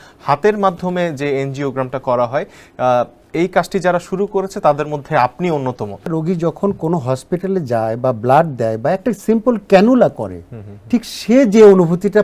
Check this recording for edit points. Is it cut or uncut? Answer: cut